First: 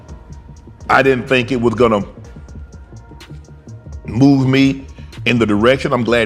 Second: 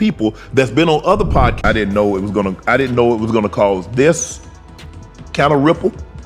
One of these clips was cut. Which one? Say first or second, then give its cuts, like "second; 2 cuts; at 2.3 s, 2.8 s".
second; 1 cut; at 1.5 s